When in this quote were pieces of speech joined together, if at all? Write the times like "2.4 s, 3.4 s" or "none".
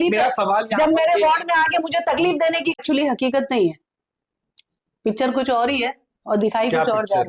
2.8 s